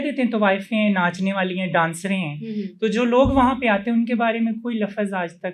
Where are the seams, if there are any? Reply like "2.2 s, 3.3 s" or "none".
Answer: none